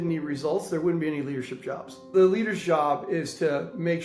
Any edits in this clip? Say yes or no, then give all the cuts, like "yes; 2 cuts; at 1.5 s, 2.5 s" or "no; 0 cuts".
yes; 1 cut; at 2.1 s